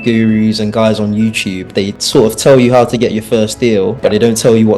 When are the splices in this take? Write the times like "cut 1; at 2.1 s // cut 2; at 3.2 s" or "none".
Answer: none